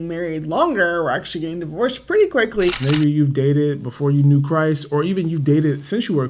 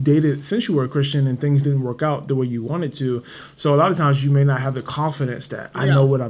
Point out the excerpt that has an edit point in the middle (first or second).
first